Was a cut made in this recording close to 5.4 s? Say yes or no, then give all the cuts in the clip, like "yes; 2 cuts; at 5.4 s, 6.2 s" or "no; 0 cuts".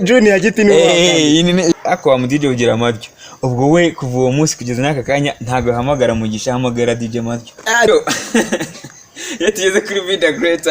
no; 2 cuts; at 1.7 s, 7.9 s